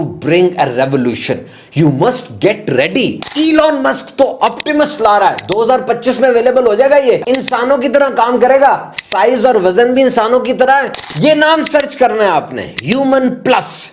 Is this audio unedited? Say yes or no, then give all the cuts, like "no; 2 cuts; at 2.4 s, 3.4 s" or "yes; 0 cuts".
no; 3 cuts; at 3.3 s, 7.2 s, 11.0 s